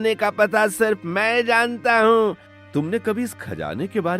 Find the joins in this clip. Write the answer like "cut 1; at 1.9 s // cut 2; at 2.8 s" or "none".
cut 1; at 2.5 s